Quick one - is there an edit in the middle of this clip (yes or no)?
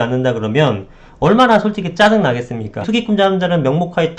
yes